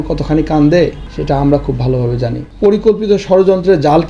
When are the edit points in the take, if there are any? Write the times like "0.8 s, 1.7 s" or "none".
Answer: 1.1 s, 2.4 s